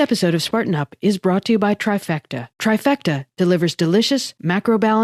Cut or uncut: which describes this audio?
uncut